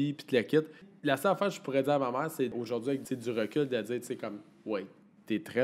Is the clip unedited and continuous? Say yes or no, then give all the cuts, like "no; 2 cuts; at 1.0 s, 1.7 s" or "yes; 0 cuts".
no; 2 cuts; at 0.9 s, 2.5 s